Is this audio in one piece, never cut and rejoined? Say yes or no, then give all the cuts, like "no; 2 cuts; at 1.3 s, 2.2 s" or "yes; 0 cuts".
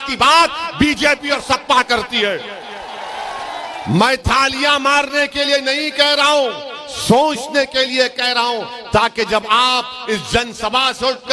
yes; 0 cuts